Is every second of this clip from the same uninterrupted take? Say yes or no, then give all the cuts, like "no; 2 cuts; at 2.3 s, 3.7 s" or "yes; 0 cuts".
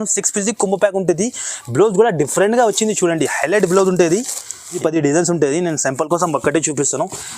no; 1 cut; at 4.8 s